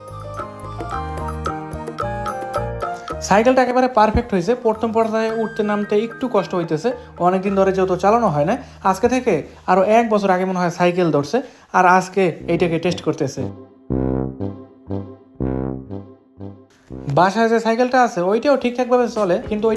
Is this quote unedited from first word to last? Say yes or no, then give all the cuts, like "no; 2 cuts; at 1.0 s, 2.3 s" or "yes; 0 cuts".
yes; 0 cuts